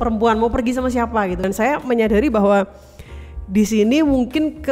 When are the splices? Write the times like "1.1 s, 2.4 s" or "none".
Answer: 1.5 s